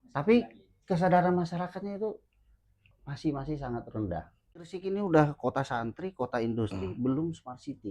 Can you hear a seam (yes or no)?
yes